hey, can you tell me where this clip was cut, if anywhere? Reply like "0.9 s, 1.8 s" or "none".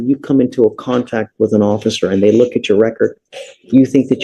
none